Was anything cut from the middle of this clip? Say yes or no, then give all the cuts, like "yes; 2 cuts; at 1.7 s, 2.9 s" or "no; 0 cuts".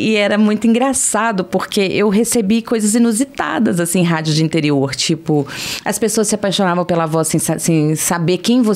no; 0 cuts